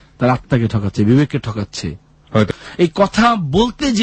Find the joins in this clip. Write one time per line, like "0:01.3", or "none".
0:02.5